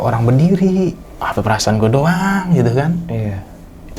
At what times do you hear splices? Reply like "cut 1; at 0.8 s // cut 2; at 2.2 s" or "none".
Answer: cut 1; at 1.1 s